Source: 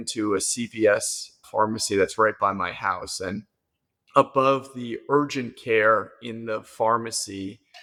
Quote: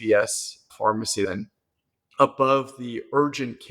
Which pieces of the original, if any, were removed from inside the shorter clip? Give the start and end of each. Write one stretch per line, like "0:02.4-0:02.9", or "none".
0:02.0-0:03.2